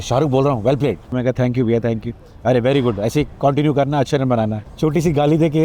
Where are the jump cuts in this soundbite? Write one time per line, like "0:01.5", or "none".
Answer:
0:01.1
0:04.6